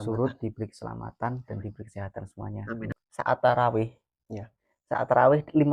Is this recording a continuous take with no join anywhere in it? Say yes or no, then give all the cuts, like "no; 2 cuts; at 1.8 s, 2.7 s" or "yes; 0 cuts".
no; 1 cut; at 3.0 s